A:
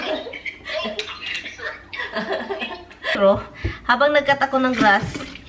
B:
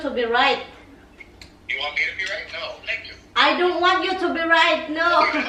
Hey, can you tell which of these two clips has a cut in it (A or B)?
A